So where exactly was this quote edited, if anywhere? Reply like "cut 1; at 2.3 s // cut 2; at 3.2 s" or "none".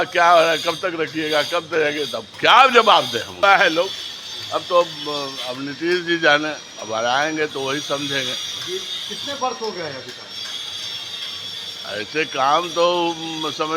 cut 1; at 3.4 s